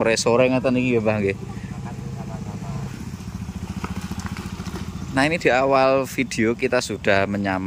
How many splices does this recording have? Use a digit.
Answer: 1